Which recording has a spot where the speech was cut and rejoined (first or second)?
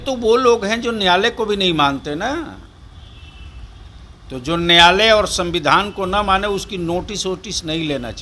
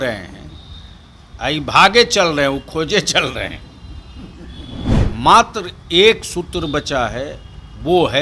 second